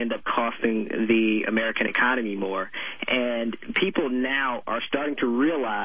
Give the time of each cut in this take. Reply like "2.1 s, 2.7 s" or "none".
none

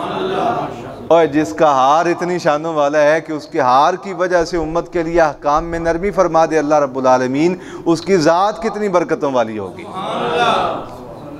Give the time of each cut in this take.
none

